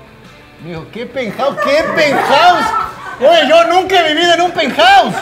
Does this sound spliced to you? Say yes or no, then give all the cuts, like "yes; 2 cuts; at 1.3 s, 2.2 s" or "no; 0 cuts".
no; 0 cuts